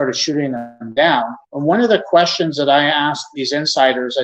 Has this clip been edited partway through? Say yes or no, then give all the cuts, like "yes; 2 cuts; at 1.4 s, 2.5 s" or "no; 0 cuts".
yes; 2 cuts; at 1.4 s, 3.2 s